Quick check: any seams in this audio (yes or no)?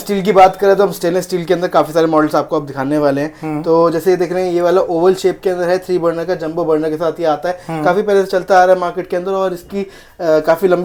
no